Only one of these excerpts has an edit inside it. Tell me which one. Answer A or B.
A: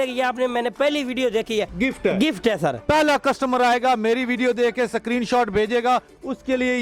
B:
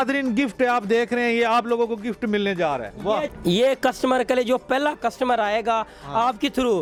A